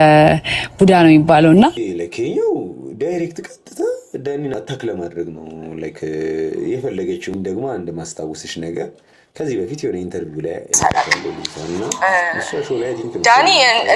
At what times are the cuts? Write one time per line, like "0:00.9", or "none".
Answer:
0:01.8
0:04.5
0:07.3
0:10.8